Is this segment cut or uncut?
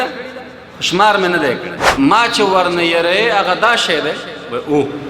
cut